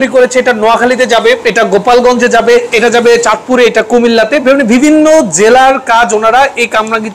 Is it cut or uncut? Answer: cut